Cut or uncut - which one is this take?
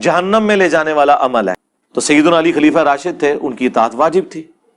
cut